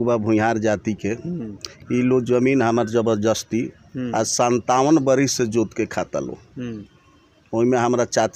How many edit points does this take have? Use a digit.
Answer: 0